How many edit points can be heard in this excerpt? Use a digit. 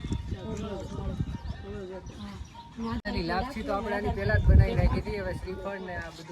1